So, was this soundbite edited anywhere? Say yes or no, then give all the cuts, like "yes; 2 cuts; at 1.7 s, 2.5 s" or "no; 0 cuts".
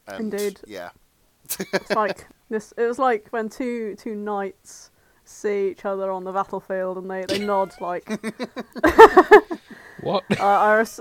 yes; 1 cut; at 2.3 s